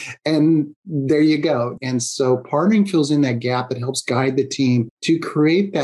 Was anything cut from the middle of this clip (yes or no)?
yes